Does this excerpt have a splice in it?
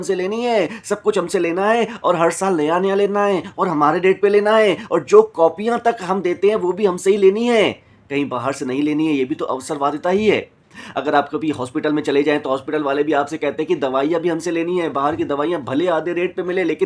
no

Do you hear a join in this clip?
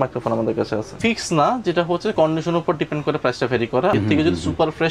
yes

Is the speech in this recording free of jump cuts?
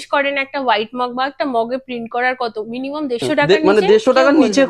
no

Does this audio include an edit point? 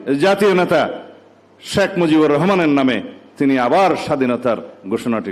no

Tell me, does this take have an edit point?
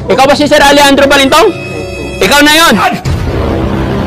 yes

